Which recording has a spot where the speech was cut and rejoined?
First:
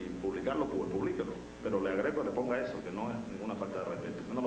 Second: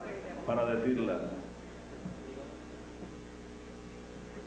first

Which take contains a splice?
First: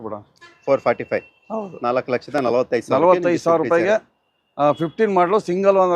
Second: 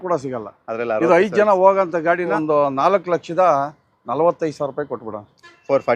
second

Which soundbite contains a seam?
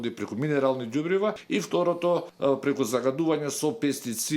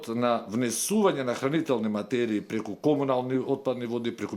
first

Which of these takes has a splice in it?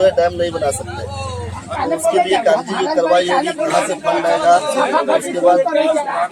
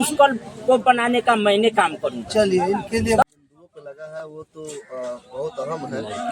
second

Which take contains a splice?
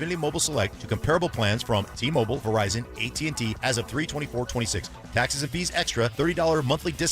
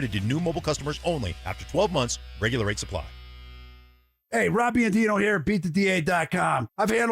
second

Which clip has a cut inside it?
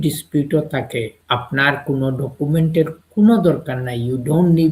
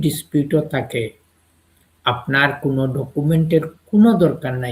first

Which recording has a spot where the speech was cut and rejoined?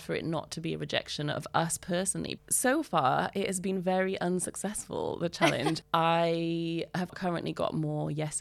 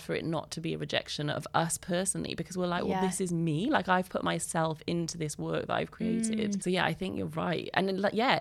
first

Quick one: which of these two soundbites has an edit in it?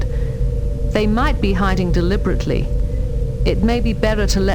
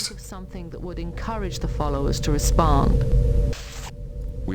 second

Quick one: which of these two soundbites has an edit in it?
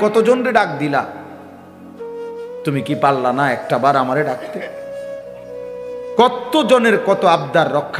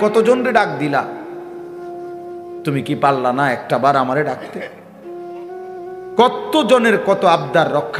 second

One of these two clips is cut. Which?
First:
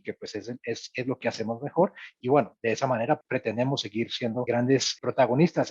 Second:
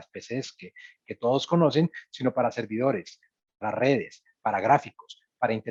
first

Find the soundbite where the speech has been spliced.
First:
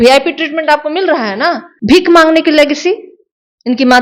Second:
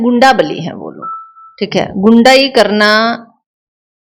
first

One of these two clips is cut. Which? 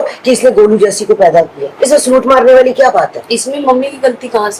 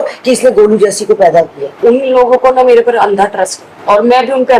second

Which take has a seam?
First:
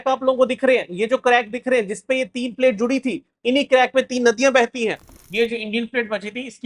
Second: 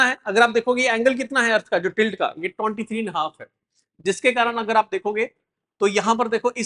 first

